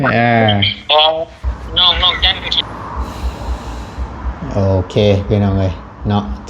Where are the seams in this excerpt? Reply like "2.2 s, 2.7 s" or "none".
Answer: 2.5 s